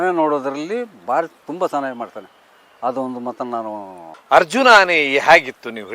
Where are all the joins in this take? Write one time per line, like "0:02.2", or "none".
0:04.0